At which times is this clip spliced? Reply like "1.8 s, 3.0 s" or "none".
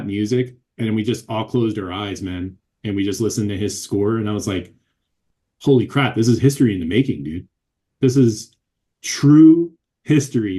none